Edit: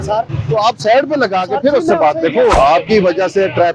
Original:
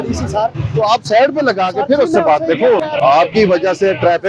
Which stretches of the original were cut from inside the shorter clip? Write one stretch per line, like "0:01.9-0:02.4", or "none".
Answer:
0:02.8-0:03.0